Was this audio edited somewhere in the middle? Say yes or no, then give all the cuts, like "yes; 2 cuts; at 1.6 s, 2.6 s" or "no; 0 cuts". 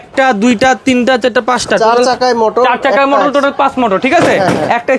no; 0 cuts